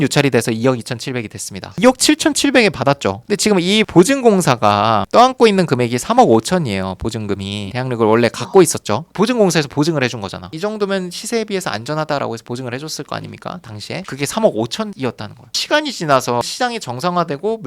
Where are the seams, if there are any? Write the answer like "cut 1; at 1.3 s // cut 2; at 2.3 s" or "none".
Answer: cut 1; at 1.8 s // cut 2; at 10.5 s